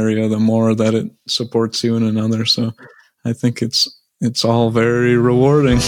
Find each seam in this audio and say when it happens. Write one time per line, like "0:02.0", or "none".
none